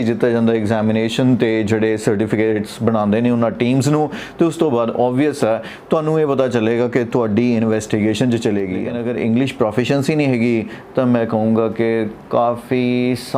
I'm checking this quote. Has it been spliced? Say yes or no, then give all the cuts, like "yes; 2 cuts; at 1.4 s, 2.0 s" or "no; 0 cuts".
yes; 1 cut; at 9.0 s